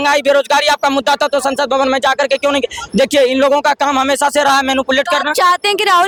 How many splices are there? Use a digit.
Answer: 0